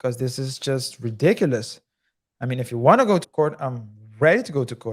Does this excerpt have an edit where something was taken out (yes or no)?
yes